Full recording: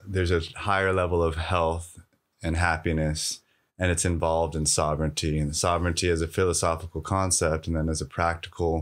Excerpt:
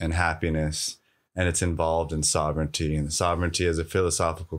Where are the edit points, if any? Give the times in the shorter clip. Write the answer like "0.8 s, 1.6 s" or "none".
none